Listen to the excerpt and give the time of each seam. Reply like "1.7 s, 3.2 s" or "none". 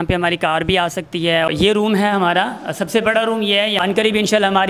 1.5 s, 3.8 s